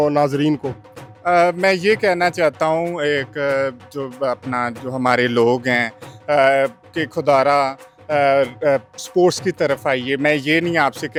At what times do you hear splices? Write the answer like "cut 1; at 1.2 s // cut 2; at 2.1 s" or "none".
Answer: none